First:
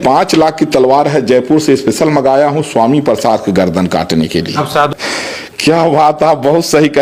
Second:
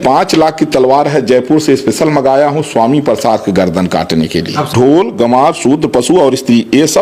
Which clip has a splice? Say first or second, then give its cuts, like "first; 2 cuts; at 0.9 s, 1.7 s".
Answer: second; 1 cut; at 4.7 s